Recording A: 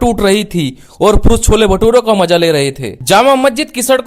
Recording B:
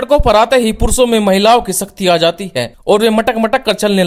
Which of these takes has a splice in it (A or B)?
A